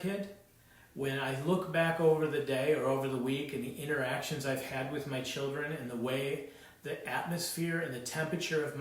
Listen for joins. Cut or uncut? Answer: uncut